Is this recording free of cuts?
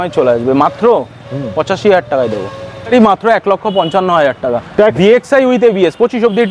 no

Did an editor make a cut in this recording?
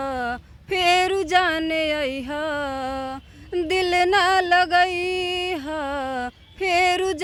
no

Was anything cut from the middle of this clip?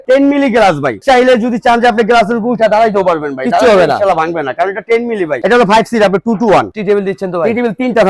yes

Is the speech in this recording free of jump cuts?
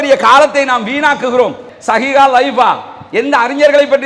no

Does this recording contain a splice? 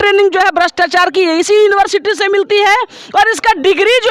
no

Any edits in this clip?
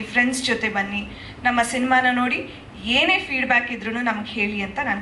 no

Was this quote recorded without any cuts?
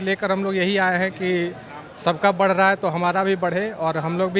yes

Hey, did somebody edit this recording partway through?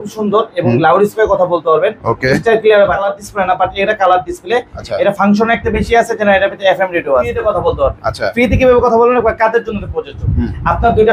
yes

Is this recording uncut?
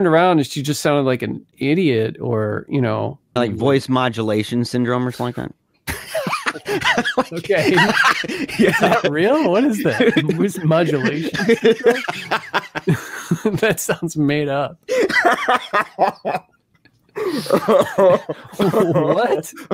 no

